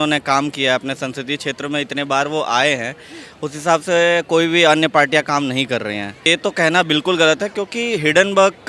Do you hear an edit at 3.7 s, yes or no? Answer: no